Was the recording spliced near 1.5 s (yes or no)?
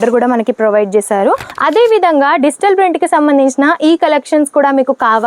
yes